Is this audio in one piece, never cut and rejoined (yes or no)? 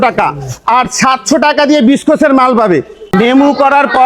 no